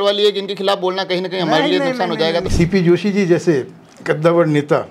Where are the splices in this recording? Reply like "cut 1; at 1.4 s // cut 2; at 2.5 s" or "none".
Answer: cut 1; at 2.5 s